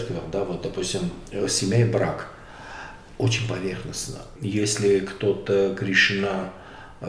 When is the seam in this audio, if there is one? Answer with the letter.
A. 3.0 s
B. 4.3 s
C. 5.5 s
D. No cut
B